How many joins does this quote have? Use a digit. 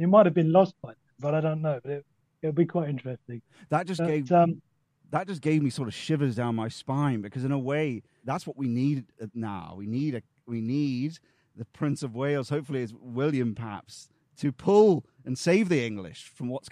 1